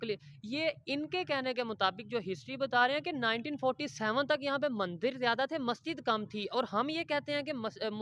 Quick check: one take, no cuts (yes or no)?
yes